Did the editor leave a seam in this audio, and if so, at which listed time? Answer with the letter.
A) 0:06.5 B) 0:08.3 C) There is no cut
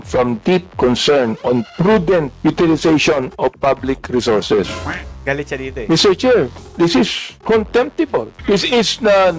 B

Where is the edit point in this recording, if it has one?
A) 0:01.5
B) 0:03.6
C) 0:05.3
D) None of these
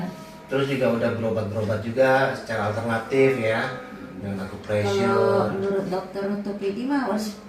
D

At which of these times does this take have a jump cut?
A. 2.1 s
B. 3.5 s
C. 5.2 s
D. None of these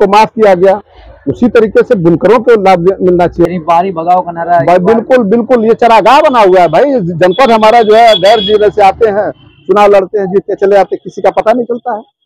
B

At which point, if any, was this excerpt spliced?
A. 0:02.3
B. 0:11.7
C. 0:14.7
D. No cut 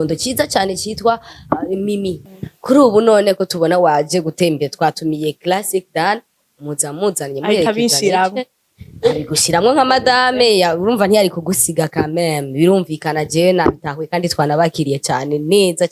A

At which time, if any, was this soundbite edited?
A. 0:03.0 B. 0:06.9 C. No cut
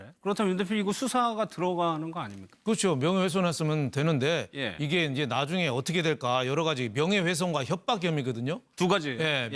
B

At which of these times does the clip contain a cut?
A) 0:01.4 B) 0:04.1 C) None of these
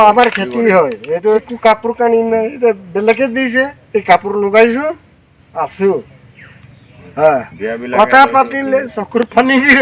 A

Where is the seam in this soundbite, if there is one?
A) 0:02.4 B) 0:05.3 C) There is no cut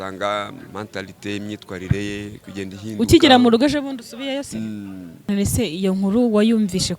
B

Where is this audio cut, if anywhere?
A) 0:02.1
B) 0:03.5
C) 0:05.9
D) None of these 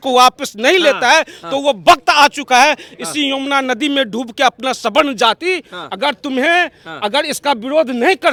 D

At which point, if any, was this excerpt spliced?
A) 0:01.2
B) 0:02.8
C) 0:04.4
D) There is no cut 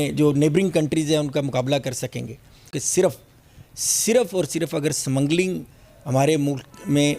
B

